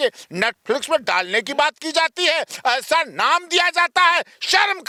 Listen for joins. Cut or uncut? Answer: uncut